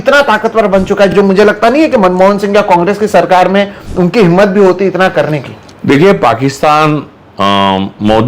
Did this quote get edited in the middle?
no; 0 cuts

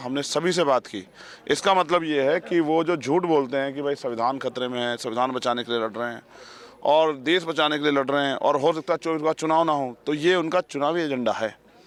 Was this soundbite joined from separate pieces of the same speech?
no; 0 cuts

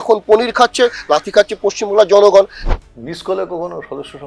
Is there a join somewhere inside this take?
yes; 1 cut; at 2.6 s

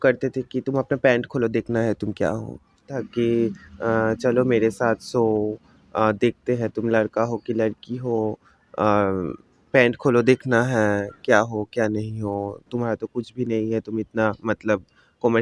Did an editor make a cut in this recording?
yes; 1 cut; at 3.0 s

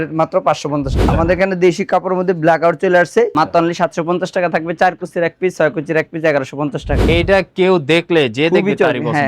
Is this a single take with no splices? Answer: no; 3 cuts; at 1.1 s, 3.3 s, 7.1 s

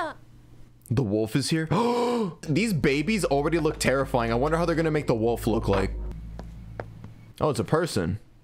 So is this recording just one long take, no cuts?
no; 3 cuts; at 2.5 s, 6.0 s, 7.2 s

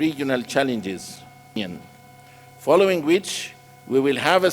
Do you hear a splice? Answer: yes; 1 cut; at 1.6 s

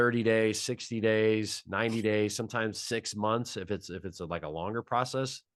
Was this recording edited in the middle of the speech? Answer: no; 0 cuts

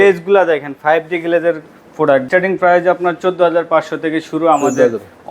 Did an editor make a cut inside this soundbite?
yes; 1 cut; at 2.2 s

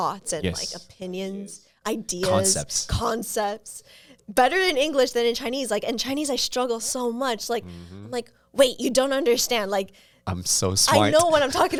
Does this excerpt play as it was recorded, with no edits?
yes; 0 cuts

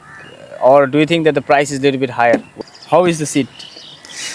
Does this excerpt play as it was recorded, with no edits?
no; 1 cut; at 2.5 s

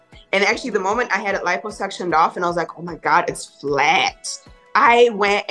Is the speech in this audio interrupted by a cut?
no; 0 cuts

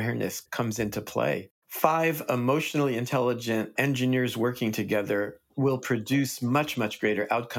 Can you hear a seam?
yes; 1 cut; at 1.5 s

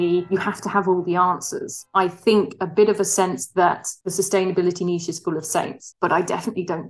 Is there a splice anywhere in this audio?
yes; 2 cuts; at 1.7 s, 5.9 s

